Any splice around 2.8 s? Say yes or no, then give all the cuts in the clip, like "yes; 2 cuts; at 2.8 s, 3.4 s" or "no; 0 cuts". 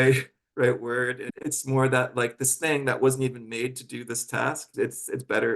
no; 2 cuts; at 1.3 s, 4.6 s